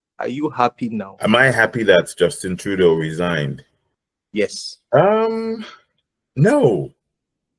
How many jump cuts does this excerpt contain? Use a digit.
1